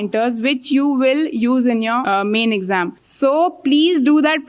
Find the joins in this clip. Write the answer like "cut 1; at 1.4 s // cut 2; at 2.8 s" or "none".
cut 1; at 2.0 s // cut 2; at 3.0 s